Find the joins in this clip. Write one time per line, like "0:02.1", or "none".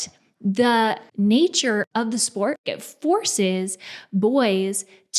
0:01.1
0:01.9
0:02.8